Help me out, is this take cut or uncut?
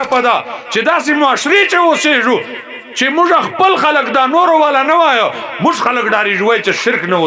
uncut